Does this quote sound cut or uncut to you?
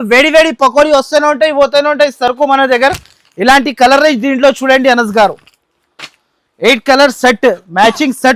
uncut